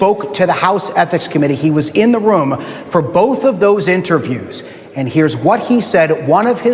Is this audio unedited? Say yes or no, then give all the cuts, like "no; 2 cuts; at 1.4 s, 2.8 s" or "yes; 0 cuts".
yes; 0 cuts